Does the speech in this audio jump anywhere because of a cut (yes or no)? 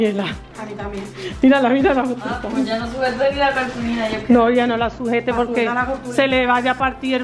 no